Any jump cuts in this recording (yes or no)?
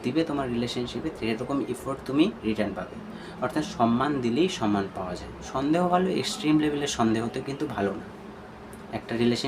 yes